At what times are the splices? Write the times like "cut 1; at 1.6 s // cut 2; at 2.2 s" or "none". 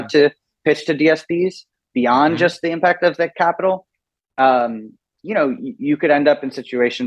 none